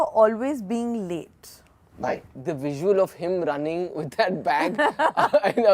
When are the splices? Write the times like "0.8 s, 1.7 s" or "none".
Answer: 2.4 s

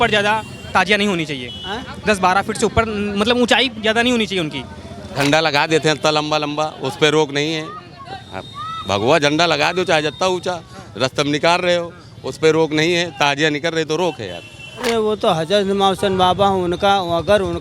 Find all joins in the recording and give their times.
5.0 s, 14.8 s

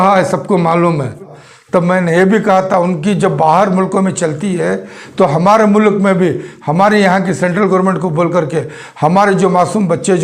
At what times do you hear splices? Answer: 1.3 s

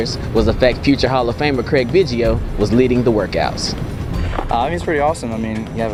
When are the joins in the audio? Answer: none

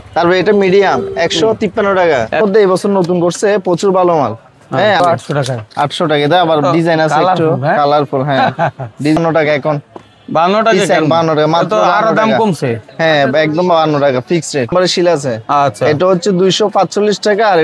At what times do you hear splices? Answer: 2.4 s, 5.0 s, 9.2 s, 14.7 s

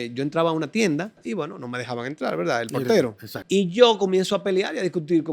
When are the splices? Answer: 1.2 s, 3.3 s

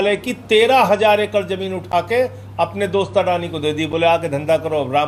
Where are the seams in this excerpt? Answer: none

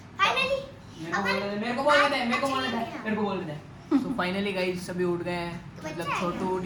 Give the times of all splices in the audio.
none

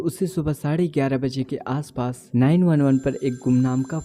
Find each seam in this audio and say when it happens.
2.2 s

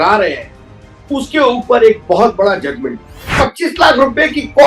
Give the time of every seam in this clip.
3.3 s

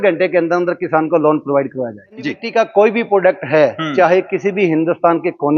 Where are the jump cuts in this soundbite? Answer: 2.3 s

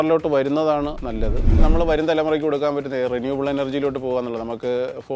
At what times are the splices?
1.5 s

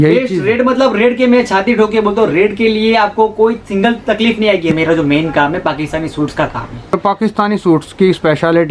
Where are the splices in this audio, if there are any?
4.7 s, 6.9 s

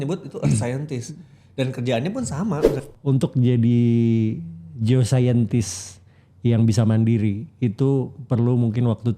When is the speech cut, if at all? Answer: 2.8 s

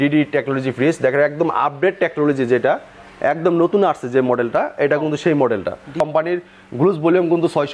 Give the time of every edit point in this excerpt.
6.0 s

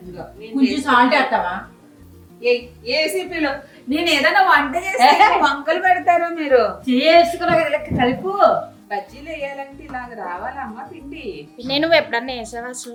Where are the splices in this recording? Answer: none

